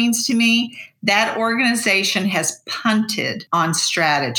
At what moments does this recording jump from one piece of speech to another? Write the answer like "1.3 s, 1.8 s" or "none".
3.4 s